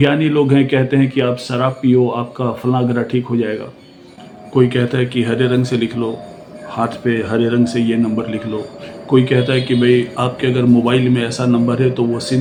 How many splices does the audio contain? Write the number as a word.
zero